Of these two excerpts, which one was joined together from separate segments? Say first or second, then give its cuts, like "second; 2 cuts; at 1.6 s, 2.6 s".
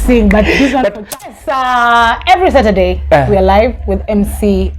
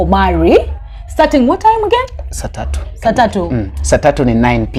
first; 1 cut; at 1.4 s